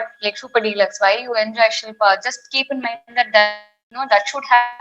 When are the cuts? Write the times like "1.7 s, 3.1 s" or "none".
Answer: 3.8 s